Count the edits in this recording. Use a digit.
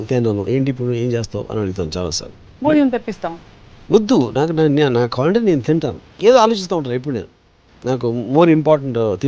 1